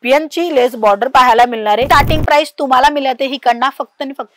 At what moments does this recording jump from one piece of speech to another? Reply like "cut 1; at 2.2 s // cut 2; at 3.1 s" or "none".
cut 1; at 1.8 s